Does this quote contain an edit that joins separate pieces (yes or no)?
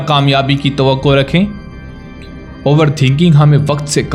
no